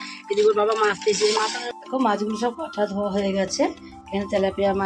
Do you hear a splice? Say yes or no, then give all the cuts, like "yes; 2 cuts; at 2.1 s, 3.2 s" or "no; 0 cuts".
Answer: yes; 1 cut; at 1.6 s